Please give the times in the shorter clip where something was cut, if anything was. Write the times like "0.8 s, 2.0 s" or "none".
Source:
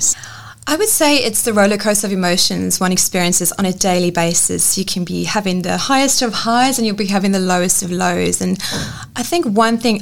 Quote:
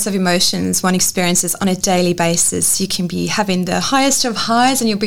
none